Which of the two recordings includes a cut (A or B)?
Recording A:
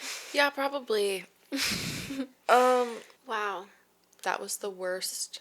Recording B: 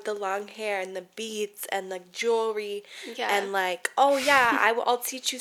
A